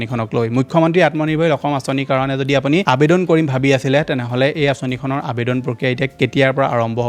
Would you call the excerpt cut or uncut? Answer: uncut